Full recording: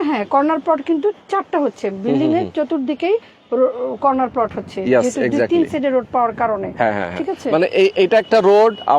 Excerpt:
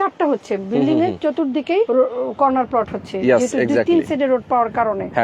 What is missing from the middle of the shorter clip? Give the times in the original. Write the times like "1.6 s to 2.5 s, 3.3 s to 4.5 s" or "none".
3.2 s to 3.5 s